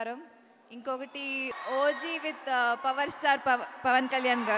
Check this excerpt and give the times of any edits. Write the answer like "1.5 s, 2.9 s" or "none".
1.6 s